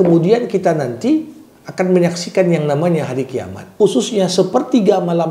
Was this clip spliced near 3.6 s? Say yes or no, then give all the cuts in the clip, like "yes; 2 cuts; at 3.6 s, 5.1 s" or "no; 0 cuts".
yes; 1 cut; at 3.6 s